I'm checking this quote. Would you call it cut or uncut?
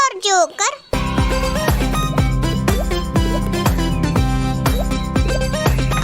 cut